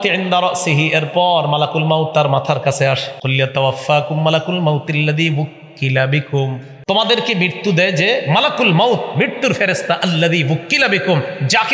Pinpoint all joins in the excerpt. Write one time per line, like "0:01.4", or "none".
0:03.1
0:06.7